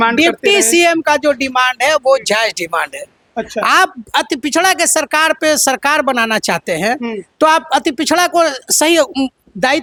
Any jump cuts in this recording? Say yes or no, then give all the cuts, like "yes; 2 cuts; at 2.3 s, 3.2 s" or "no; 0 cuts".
no; 0 cuts